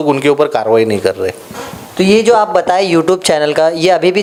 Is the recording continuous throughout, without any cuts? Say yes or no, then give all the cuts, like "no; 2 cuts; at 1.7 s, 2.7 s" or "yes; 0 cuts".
yes; 0 cuts